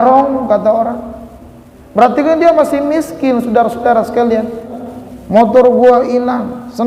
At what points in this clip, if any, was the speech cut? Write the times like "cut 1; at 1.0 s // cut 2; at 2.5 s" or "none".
cut 1; at 4.8 s